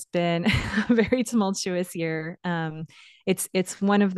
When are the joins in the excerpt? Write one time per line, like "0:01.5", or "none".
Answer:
none